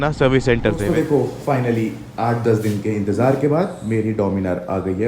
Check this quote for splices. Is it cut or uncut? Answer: cut